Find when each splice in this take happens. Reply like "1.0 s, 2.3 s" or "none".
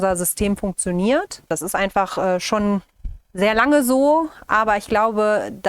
1.5 s